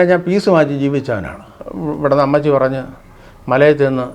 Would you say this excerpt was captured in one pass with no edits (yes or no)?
no